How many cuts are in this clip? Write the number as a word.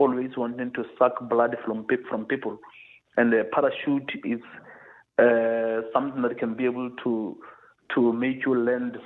zero